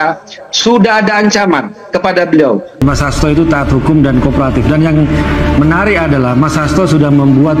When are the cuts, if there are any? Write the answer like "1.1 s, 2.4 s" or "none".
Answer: 2.8 s

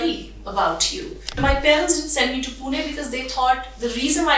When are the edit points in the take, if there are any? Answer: 1.4 s

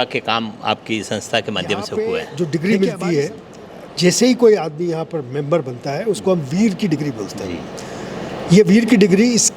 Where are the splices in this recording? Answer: 1.9 s

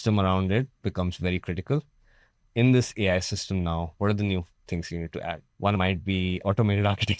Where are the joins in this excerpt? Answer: 2.4 s, 6.4 s

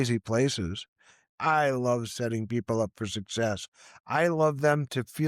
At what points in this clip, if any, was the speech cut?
1.3 s

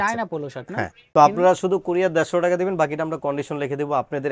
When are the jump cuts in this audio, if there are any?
1.1 s

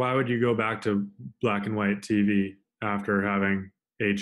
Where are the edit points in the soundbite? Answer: none

